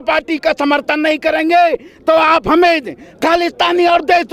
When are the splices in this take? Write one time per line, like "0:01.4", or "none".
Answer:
none